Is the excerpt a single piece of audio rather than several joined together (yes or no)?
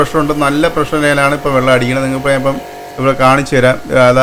yes